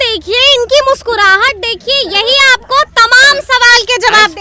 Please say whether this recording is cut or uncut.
uncut